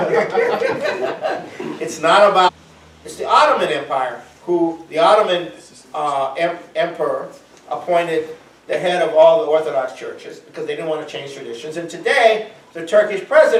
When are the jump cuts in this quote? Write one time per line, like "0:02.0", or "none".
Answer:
none